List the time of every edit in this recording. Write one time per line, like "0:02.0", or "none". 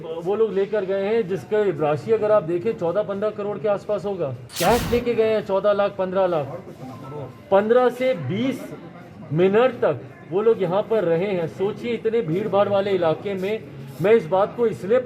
0:04.4